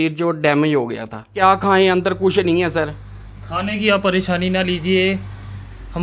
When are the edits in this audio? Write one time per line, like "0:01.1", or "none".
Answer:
0:01.2